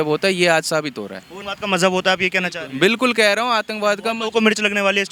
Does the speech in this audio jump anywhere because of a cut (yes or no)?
no